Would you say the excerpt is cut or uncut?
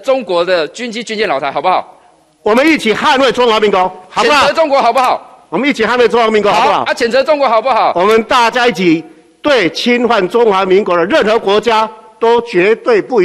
uncut